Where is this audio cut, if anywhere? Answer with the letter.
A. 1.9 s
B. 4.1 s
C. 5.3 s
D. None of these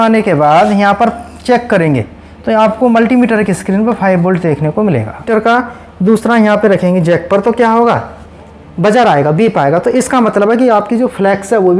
C